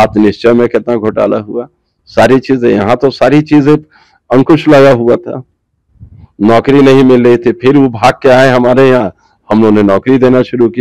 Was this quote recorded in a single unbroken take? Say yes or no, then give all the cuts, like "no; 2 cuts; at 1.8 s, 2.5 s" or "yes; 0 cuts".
yes; 0 cuts